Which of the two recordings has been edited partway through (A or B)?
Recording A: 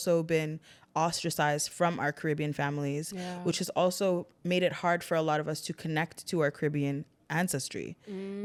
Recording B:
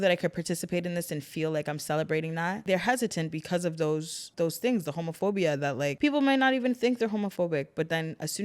B